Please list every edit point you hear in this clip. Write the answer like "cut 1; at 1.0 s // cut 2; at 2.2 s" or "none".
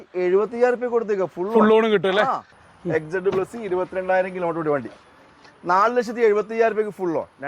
cut 1; at 2.6 s